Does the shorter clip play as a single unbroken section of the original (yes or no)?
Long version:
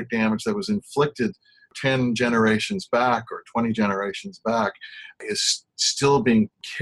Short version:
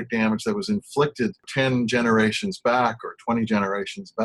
no